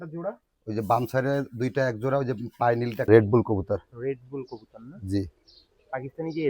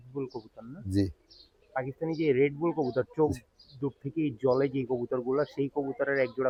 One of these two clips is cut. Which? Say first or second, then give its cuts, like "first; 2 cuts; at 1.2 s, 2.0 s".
first; 1 cut; at 3.0 s